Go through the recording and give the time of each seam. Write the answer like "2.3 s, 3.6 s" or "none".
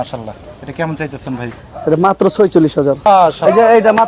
3.1 s